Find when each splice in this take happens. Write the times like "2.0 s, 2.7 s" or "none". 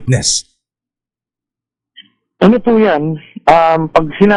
none